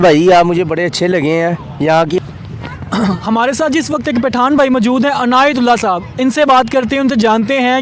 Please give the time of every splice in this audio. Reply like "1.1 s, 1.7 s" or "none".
2.3 s